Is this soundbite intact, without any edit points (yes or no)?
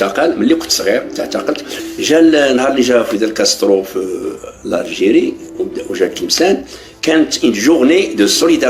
no